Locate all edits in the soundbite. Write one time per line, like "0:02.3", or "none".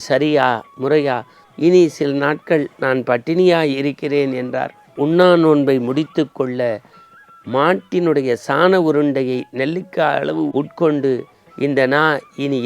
0:04.9